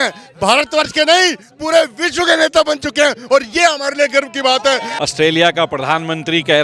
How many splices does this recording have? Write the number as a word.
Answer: one